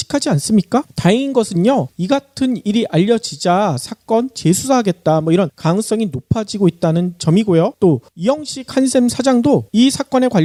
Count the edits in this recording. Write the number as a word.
zero